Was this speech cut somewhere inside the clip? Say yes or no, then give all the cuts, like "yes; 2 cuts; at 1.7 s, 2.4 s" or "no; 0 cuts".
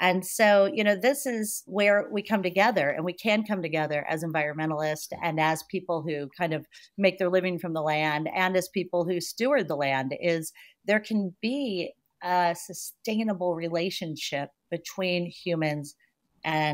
yes; 1 cut; at 1.7 s